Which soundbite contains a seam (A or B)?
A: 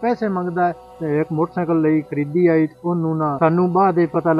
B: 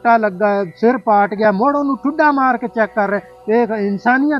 A